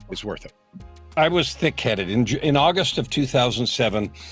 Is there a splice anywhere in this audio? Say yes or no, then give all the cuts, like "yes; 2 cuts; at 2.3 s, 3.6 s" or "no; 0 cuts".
yes; 1 cut; at 1.1 s